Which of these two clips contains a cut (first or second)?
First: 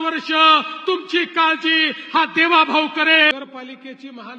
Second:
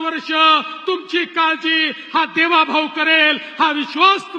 first